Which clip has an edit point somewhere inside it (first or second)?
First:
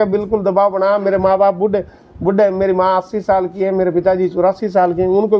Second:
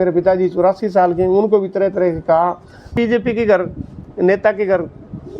second